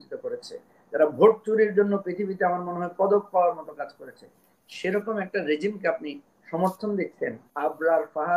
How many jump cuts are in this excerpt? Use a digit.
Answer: 1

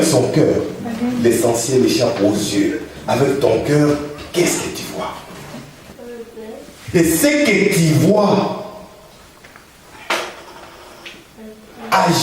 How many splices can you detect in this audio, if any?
1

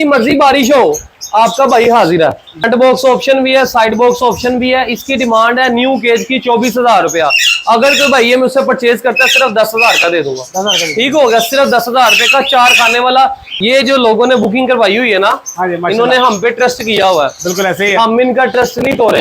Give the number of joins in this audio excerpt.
2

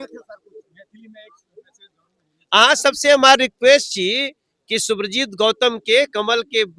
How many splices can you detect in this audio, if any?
0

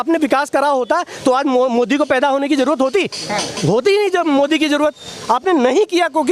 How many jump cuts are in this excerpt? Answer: 0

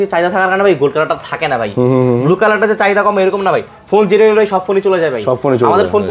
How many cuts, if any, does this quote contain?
0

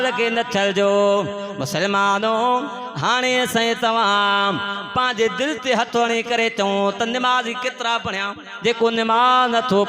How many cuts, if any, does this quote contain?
1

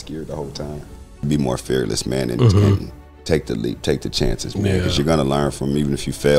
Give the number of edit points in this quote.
1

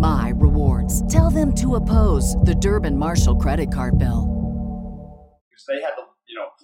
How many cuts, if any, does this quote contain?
1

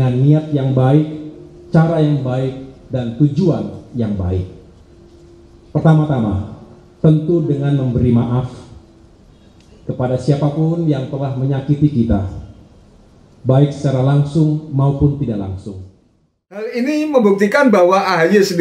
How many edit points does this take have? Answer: 1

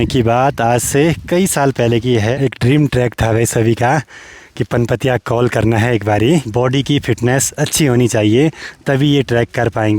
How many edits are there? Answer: 2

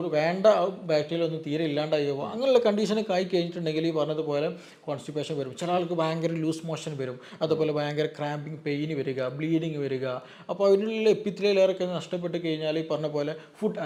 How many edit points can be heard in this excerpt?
0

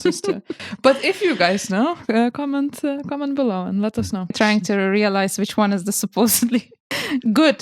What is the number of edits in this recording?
1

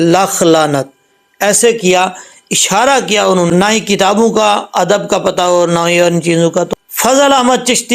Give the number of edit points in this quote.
2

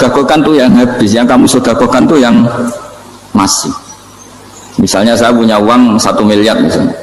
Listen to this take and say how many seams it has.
0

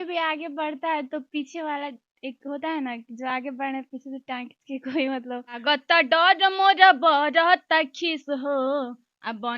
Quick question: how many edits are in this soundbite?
1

